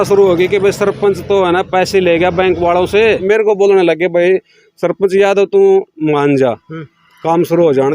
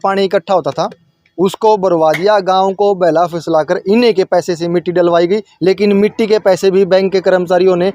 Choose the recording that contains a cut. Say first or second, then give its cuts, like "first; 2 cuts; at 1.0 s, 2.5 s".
first; 1 cut; at 3.2 s